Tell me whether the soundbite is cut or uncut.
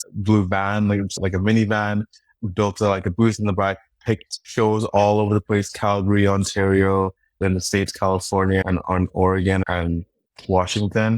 cut